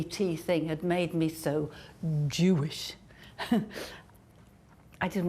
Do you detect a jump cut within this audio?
no; 0 cuts

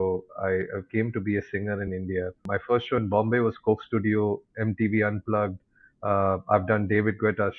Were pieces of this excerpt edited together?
yes; 1 cut; at 2.4 s

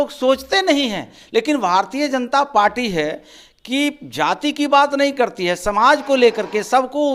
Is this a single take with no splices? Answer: yes; 0 cuts

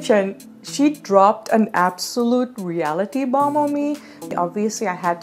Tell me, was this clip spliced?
yes; 1 cut; at 4.3 s

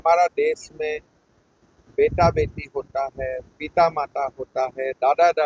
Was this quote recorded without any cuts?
yes; 0 cuts

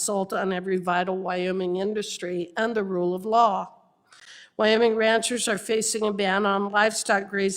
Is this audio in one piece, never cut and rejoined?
yes; 0 cuts

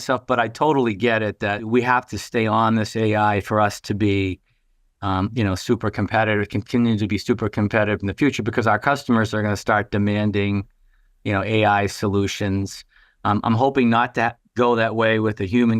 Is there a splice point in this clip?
yes; 1 cut; at 1.7 s

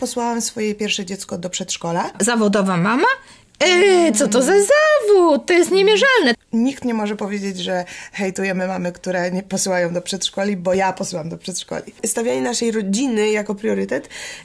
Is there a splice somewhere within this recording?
yes; 3 cuts; at 2.2 s, 6.4 s, 12.0 s

